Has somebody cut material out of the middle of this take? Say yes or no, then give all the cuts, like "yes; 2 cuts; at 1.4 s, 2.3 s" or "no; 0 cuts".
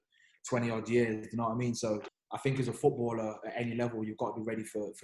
yes; 1 cut; at 2.1 s